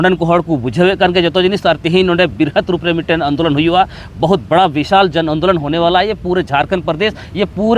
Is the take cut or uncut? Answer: uncut